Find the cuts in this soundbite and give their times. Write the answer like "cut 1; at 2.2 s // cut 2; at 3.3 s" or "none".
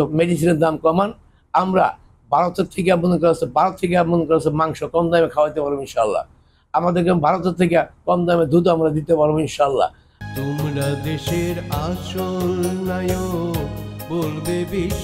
cut 1; at 10.1 s